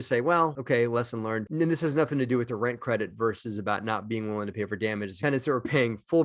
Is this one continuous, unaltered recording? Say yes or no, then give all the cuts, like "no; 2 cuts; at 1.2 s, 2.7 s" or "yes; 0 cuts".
yes; 0 cuts